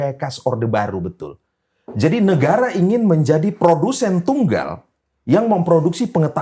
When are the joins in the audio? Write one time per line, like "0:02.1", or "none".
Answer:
none